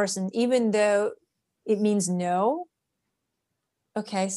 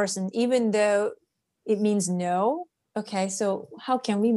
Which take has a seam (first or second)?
second